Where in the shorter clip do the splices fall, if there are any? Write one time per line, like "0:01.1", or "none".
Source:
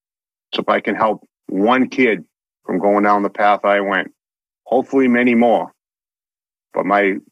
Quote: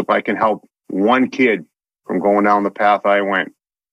none